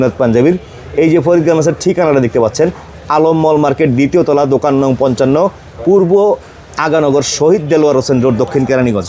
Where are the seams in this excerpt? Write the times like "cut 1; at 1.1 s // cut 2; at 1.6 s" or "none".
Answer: none